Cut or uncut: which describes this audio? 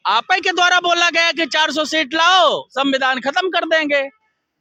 uncut